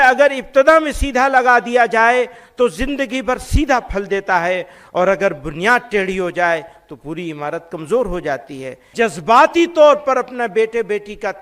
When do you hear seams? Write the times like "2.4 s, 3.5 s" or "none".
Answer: 8.9 s